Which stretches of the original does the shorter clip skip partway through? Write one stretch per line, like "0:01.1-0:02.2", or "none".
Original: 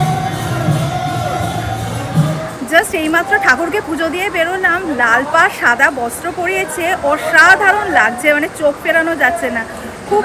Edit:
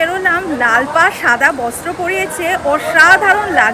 none